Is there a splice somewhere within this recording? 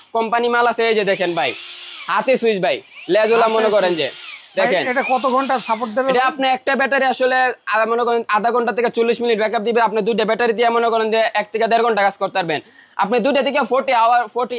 no; 0 cuts

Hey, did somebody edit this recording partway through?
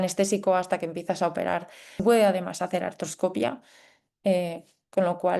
yes; 1 cut; at 2.0 s

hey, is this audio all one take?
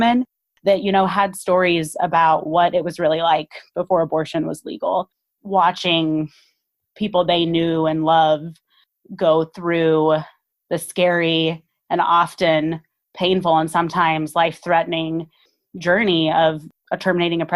no; 2 cuts; at 5.3 s, 16.7 s

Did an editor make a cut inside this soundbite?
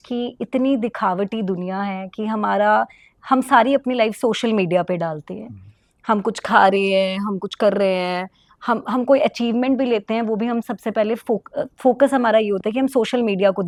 no; 0 cuts

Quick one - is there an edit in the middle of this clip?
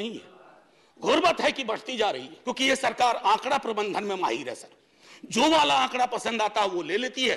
yes; 1 cut; at 2.4 s

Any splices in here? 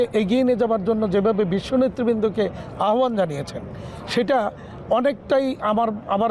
no; 0 cuts

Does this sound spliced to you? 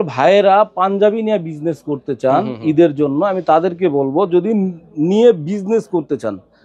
no; 0 cuts

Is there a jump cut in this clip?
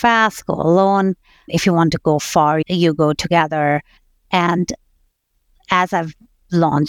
yes; 3 cuts; at 1.5 s, 2.6 s, 4.0 s

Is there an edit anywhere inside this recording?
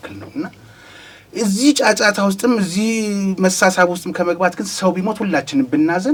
no; 0 cuts

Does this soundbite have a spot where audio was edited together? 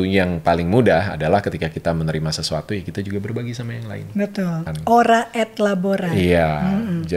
yes; 1 cut; at 4.7 s

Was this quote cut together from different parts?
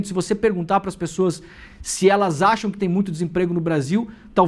yes; 1 cut; at 2.6 s

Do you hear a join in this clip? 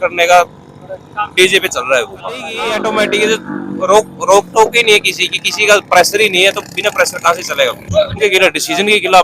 yes; 2 cuts; at 2.5 s, 8.2 s

